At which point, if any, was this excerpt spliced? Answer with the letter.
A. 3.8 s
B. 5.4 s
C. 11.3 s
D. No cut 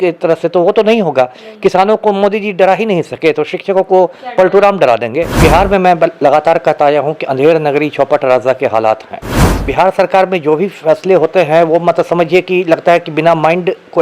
B